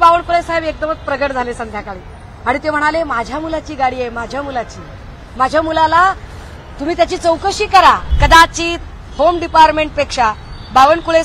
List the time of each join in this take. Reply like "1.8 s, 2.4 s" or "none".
8.1 s